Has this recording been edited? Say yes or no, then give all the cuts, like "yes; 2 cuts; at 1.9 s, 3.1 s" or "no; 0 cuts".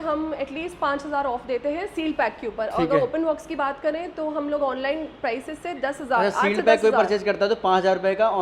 no; 0 cuts